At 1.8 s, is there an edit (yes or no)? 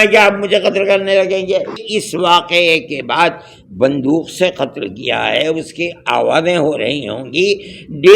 yes